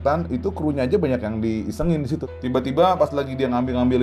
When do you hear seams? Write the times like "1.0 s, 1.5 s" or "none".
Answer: 2.3 s